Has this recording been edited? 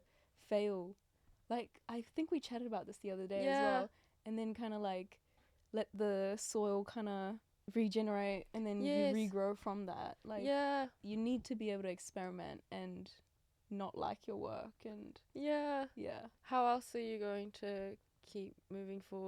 yes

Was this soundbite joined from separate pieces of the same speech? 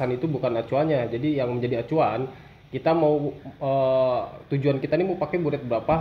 no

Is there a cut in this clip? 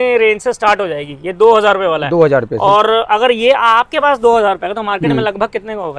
no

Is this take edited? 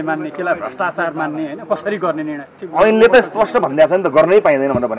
yes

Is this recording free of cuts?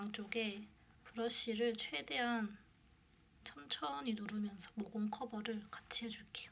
yes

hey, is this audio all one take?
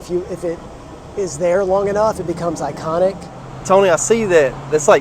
no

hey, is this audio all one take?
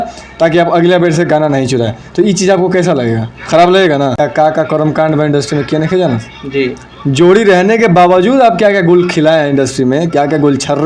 no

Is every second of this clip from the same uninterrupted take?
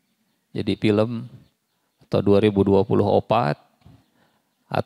yes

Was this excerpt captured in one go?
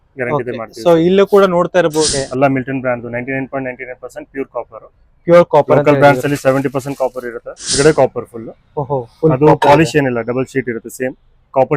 no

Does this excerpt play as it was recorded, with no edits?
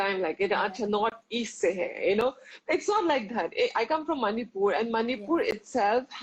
yes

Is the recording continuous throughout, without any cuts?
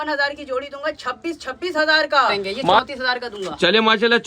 no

